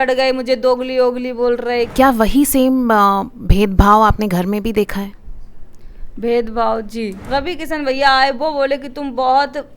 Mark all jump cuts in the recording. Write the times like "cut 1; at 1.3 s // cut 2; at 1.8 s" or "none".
cut 1; at 1.9 s // cut 2; at 7.2 s